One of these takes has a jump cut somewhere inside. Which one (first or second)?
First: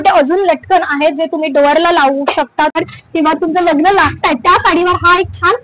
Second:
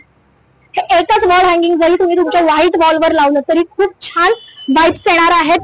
first